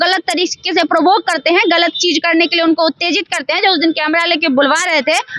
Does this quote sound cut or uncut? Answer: uncut